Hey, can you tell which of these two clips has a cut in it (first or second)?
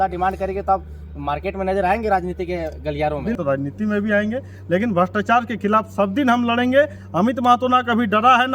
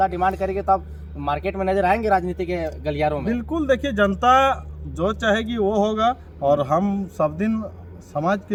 first